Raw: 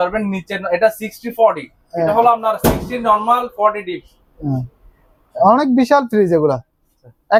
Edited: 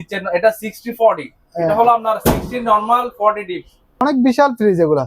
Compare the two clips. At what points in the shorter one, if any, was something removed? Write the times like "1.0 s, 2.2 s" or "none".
4.0 s